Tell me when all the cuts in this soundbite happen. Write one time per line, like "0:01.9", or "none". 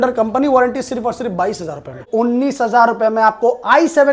0:02.0